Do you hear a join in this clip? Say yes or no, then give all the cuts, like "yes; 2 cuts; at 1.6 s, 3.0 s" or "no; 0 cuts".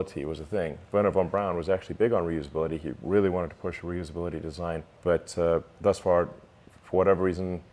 yes; 2 cuts; at 4.9 s, 5.7 s